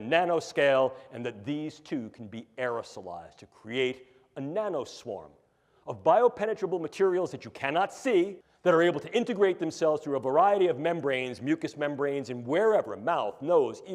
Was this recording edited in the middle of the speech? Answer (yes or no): yes